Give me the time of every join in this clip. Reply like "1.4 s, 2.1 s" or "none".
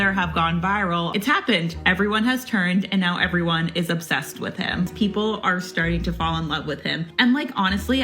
1.1 s, 4.9 s, 7.1 s